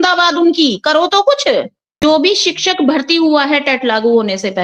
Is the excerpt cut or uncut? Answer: cut